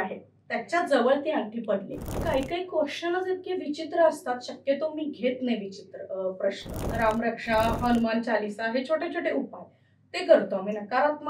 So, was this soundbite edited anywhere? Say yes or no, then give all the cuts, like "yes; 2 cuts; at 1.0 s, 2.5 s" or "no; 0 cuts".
yes; 2 cuts; at 2.2 s, 6.8 s